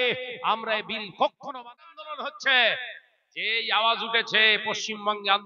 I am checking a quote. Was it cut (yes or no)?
yes